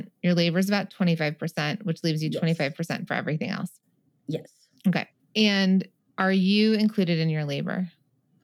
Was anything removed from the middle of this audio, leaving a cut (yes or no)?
yes